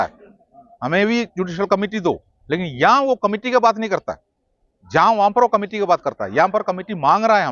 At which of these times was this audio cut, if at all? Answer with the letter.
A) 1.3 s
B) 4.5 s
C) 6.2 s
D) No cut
D